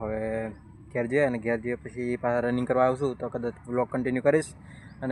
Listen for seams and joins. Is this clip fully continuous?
yes; 0 cuts

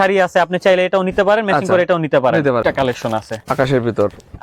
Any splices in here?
yes; 1 cut; at 2.6 s

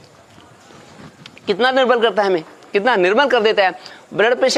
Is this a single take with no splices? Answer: yes; 0 cuts

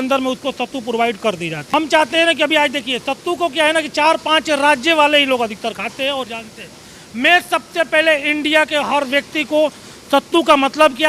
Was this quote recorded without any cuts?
yes; 0 cuts

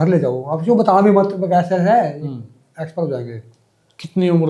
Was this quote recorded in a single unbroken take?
no; 1 cut; at 3.6 s

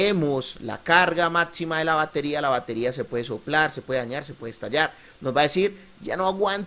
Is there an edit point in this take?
no; 0 cuts

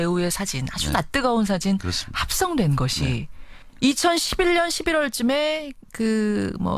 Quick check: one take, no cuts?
yes; 0 cuts

